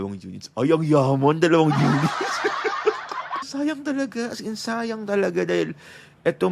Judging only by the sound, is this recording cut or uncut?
cut